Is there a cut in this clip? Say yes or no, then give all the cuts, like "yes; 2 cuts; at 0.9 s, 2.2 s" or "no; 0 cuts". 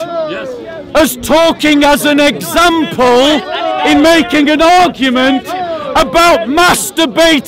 no; 0 cuts